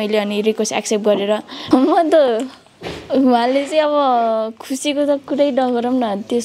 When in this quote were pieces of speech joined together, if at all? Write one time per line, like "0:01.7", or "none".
0:01.5